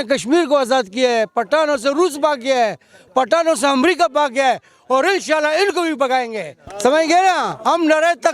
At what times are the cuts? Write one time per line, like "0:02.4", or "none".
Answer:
0:06.7